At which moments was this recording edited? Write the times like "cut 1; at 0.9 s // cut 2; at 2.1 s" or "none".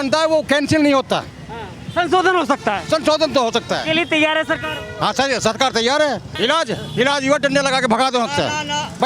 cut 1; at 6.3 s